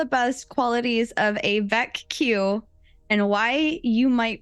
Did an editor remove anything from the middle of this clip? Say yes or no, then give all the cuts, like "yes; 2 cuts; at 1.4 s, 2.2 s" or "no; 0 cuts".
no; 0 cuts